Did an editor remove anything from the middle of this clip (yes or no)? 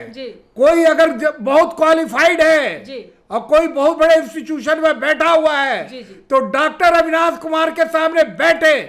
no